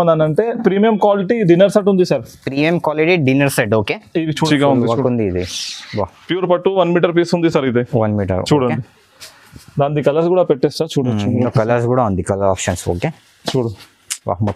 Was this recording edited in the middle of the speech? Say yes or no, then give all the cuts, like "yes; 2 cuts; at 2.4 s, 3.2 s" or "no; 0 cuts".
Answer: yes; 1 cut; at 4.5 s